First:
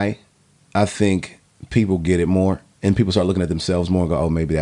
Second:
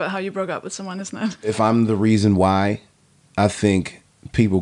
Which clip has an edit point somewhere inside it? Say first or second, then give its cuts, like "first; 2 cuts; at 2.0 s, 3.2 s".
second; 1 cut; at 1.5 s